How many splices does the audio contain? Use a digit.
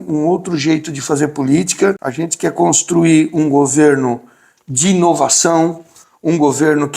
1